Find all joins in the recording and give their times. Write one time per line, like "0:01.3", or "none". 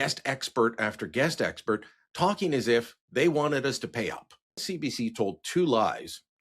0:04.6